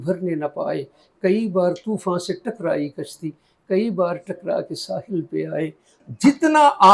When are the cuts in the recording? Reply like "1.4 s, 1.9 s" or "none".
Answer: 6.0 s